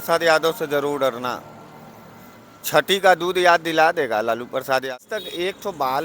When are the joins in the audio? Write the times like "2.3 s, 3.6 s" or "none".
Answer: 4.9 s